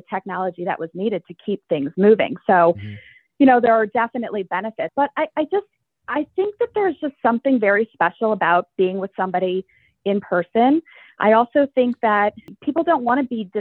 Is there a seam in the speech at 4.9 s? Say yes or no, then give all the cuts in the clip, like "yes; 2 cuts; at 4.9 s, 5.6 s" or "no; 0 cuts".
yes; 2 cuts; at 4.9 s, 12.5 s